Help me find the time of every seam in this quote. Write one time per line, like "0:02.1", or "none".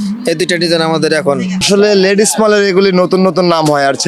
0:01.6